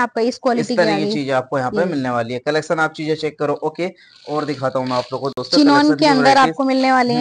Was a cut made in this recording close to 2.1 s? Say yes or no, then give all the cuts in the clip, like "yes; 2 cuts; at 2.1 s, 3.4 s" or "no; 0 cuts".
no; 0 cuts